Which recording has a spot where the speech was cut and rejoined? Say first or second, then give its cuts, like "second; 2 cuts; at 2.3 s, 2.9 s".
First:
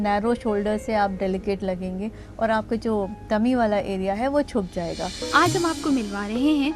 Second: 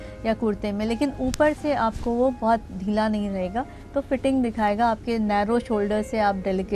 first; 1 cut; at 5.2 s